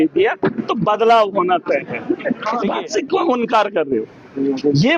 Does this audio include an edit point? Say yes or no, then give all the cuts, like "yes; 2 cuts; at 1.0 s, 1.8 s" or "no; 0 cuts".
yes; 1 cut; at 2.6 s